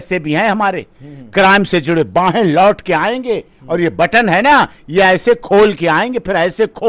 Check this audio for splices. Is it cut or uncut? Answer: uncut